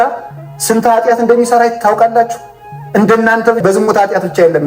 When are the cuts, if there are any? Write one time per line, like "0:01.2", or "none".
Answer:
0:03.6